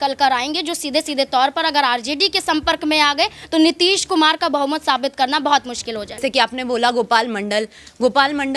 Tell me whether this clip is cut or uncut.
cut